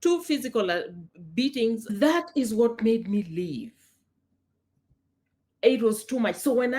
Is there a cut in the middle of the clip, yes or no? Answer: yes